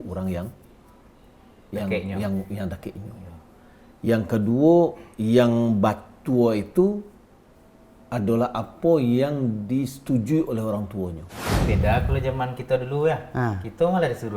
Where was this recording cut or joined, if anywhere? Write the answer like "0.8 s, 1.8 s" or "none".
11.5 s